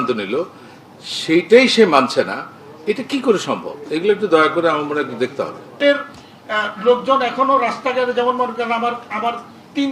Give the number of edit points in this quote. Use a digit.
1